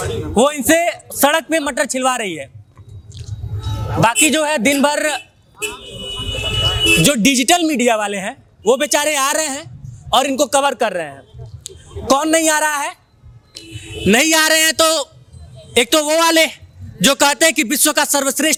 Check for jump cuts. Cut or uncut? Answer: uncut